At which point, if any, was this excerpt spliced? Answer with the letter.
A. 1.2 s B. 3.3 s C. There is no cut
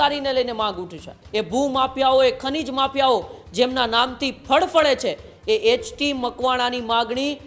A